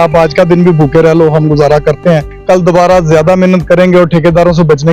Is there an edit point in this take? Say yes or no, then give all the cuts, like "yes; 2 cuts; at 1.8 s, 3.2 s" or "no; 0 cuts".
yes; 1 cut; at 2.3 s